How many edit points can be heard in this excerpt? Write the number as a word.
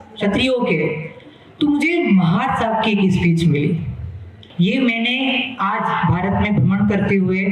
one